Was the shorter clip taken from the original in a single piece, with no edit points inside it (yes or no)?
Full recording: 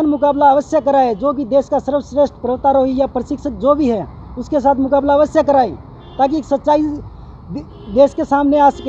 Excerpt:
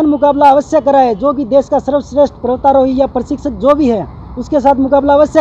yes